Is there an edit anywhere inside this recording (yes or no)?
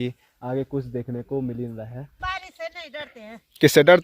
yes